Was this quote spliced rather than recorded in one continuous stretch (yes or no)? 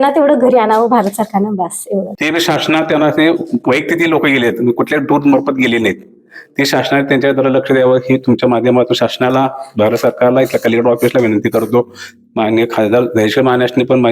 yes